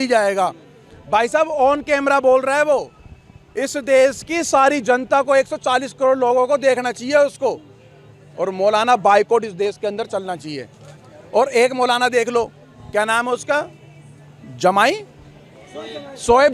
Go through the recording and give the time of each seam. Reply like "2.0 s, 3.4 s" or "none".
none